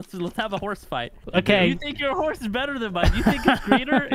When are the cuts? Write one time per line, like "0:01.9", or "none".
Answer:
0:01.3